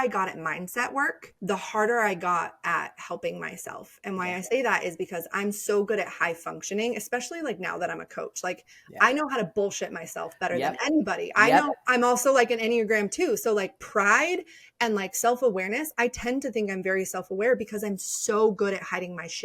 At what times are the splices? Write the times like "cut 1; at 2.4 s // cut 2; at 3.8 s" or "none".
cut 1; at 1.3 s // cut 2; at 11.8 s